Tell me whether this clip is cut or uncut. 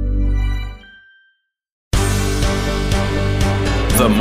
cut